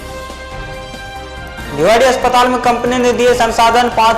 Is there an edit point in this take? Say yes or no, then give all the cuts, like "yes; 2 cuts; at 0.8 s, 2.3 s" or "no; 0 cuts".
yes; 1 cut; at 1.2 s